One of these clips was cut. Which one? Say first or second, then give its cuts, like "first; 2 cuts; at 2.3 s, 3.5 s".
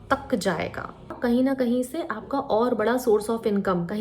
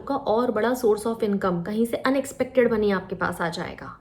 first; 1 cut; at 1.1 s